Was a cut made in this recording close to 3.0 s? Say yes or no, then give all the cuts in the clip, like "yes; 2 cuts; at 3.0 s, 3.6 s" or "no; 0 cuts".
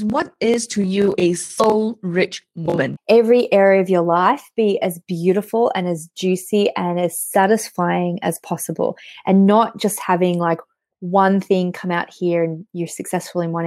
yes; 1 cut; at 3.0 s